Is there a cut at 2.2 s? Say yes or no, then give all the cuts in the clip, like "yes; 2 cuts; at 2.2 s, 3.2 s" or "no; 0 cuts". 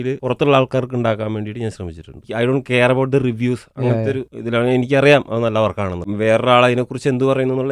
yes; 2 cuts; at 2.2 s, 6.0 s